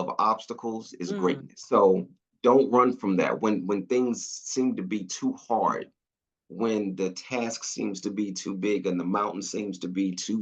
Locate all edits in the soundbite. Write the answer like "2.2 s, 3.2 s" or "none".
1.5 s